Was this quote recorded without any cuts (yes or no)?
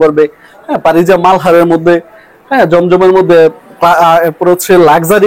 yes